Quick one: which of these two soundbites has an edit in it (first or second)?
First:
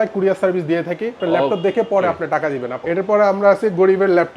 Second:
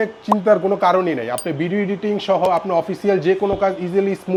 first